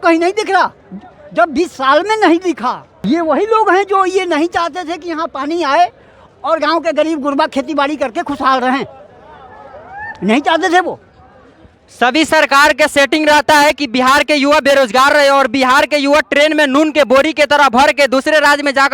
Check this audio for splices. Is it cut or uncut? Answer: cut